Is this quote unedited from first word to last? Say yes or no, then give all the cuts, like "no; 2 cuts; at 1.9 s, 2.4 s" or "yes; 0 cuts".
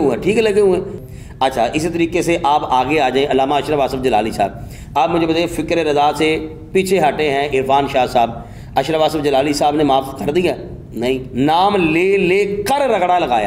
no; 1 cut; at 0.9 s